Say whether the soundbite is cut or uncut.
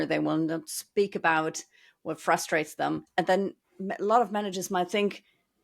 cut